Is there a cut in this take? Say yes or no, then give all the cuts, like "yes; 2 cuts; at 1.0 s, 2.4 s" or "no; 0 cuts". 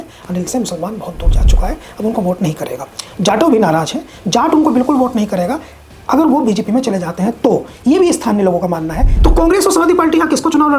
yes; 1 cut; at 9.1 s